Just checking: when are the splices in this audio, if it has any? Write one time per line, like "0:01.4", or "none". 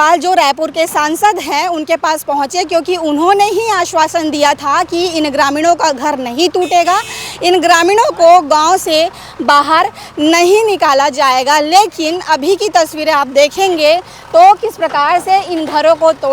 none